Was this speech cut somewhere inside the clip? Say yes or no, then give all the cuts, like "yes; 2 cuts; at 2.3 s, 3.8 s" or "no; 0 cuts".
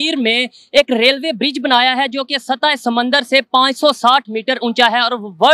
no; 0 cuts